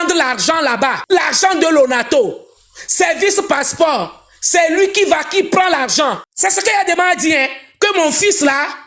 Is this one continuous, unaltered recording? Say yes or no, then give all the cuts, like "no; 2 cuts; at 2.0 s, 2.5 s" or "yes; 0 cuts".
no; 2 cuts; at 1.0 s, 6.3 s